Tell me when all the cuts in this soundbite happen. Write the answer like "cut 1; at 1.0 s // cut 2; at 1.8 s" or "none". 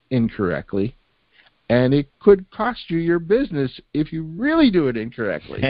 none